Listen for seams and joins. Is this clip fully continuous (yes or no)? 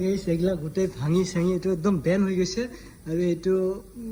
yes